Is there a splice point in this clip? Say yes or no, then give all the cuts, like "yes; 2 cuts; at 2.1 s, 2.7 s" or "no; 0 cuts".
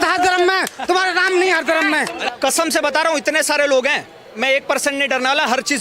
yes; 1 cut; at 2.2 s